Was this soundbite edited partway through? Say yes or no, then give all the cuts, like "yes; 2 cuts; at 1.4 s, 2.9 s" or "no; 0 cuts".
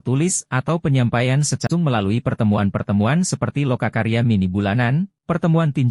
yes; 1 cut; at 1.7 s